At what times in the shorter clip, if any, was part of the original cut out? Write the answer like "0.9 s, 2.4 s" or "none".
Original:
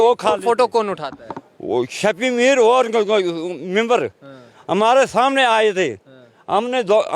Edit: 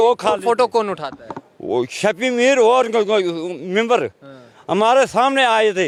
none